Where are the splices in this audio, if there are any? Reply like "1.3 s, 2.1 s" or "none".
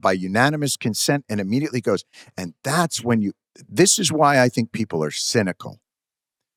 none

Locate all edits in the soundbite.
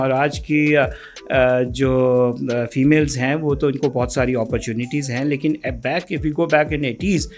none

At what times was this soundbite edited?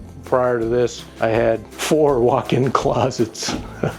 1.0 s, 1.8 s

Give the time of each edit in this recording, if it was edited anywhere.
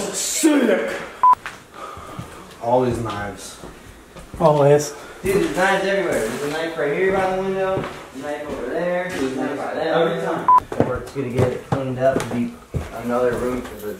1.4 s, 10.6 s

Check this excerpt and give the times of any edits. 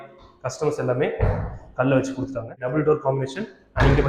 2.6 s

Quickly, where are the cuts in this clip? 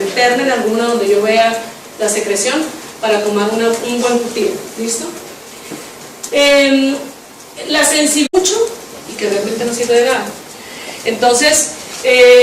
none

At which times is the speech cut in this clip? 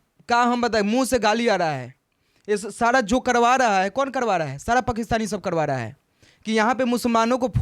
none

